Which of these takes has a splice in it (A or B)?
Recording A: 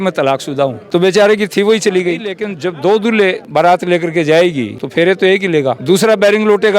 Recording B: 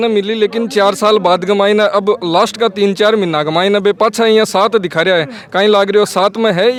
A